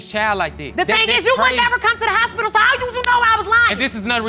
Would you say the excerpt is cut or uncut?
uncut